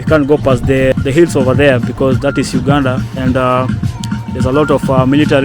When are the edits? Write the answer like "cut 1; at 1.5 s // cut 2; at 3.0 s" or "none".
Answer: cut 1; at 0.9 s